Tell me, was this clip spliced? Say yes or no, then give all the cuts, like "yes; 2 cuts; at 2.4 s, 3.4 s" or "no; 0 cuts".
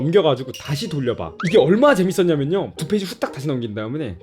yes; 2 cuts; at 1.3 s, 2.7 s